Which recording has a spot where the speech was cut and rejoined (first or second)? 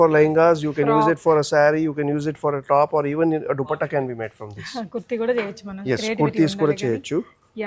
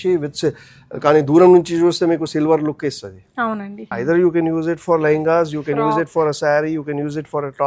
second